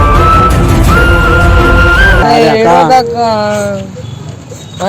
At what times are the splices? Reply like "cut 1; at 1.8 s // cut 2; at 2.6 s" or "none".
cut 1; at 2.2 s